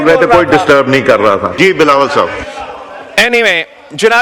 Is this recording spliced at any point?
yes; 1 cut; at 1.5 s

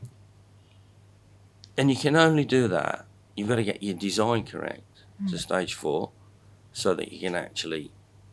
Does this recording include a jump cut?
no; 0 cuts

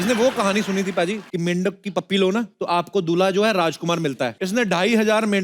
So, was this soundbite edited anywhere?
yes; 3 cuts; at 1.2 s, 2.5 s, 4.4 s

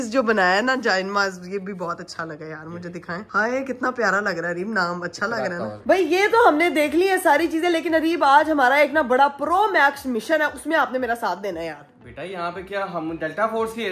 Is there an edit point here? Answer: no; 0 cuts

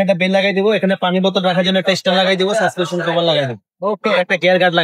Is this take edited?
no; 0 cuts

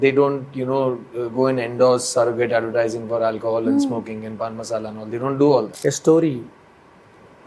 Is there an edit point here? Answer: yes; 1 cut; at 5.7 s

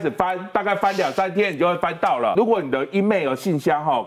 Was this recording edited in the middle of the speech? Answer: yes; 1 cut; at 2.3 s

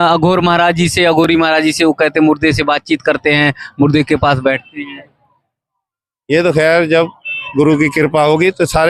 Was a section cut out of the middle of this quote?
no; 0 cuts

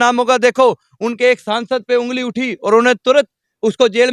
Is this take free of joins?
yes; 0 cuts

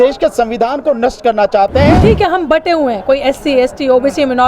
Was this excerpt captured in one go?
no; 1 cut; at 2.0 s

